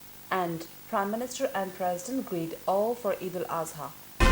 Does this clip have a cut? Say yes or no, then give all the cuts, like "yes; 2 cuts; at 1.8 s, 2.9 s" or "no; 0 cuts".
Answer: no; 0 cuts